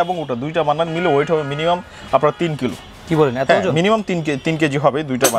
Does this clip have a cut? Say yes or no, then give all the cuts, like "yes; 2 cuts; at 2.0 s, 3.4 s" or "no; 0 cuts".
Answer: no; 0 cuts